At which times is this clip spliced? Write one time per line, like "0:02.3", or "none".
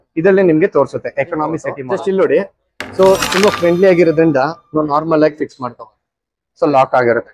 0:01.8
0:06.4